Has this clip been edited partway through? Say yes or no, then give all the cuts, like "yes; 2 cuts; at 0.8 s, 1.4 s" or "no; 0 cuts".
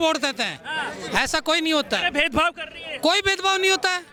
no; 0 cuts